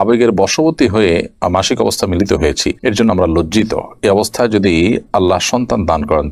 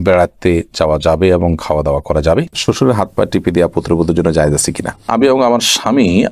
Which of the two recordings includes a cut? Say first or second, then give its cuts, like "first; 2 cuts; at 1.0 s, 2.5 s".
second; 2 cuts; at 2.5 s, 5.1 s